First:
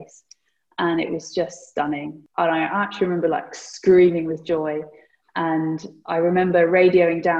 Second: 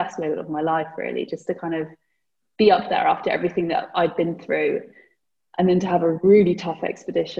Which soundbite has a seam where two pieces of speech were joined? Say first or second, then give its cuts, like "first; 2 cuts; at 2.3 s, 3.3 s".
first; 1 cut; at 2.2 s